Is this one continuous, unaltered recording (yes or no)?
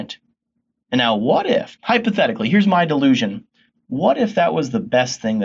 no